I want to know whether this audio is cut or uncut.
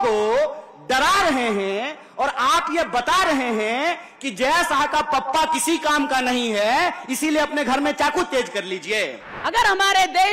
cut